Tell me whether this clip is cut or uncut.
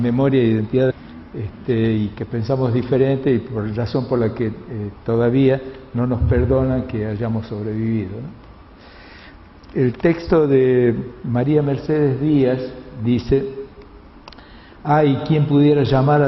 uncut